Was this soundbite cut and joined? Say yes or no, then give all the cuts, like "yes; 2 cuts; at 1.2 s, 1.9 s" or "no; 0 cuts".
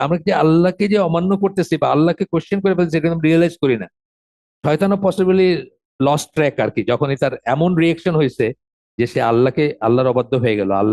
no; 0 cuts